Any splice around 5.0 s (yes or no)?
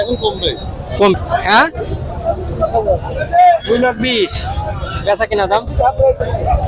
no